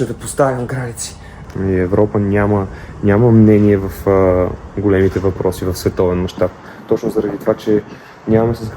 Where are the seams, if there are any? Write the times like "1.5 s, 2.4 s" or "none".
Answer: 1.3 s